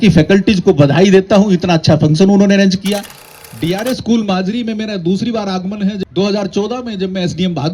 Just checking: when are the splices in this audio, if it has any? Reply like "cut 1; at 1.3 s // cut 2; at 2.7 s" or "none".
cut 1; at 3.1 s // cut 2; at 6.0 s